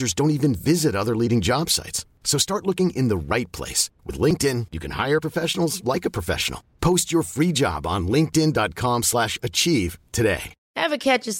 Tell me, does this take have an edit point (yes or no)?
no